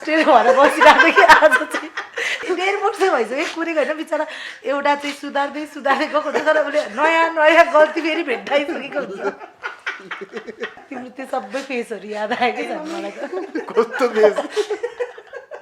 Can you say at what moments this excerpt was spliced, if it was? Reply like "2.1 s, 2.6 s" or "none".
2.4 s, 10.8 s